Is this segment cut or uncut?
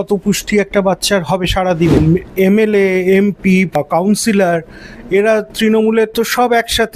cut